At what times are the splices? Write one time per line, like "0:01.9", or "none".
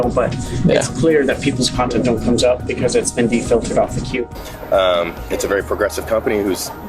0:04.2